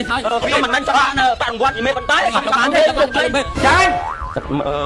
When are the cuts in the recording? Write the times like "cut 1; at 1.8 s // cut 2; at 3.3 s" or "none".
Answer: cut 1; at 3.5 s